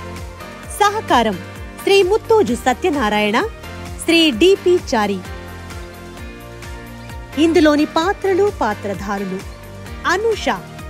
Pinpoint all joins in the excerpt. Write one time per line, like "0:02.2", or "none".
0:00.8
0:05.2
0:07.3